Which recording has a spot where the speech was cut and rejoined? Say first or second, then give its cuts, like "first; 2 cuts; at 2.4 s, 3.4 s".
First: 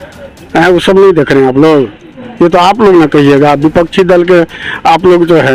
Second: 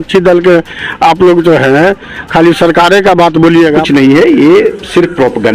second; 1 cut; at 3.8 s